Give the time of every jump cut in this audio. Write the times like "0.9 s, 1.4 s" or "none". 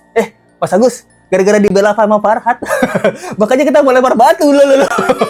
none

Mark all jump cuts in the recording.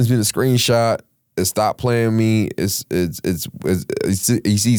none

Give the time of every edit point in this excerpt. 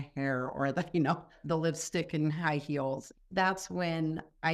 1.4 s, 3.1 s

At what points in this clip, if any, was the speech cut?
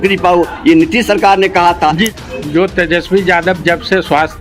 2.1 s

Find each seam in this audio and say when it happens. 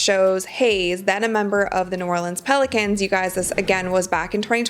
none

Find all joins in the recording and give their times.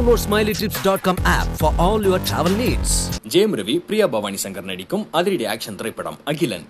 none

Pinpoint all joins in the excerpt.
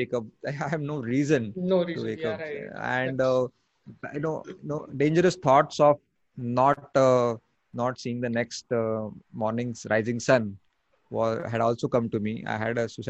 none

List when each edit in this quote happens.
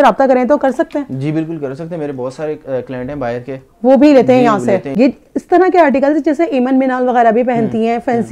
4.9 s

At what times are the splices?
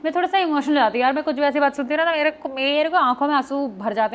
none

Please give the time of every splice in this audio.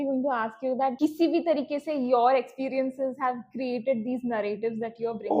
0.9 s

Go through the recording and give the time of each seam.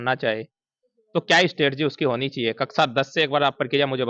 none

